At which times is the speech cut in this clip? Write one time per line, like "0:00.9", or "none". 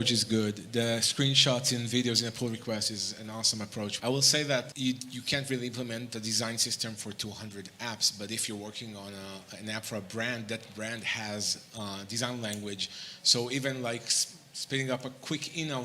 0:03.9
0:04.7